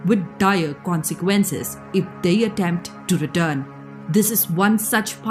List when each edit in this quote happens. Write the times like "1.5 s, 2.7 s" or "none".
none